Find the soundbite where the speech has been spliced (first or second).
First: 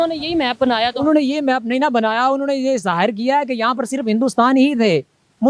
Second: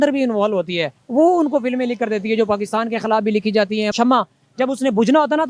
second